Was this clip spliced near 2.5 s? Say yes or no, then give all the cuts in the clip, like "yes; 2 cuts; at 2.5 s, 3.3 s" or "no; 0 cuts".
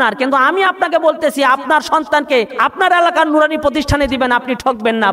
yes; 1 cut; at 2.5 s